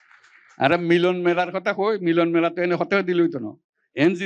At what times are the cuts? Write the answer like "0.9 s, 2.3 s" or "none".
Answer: none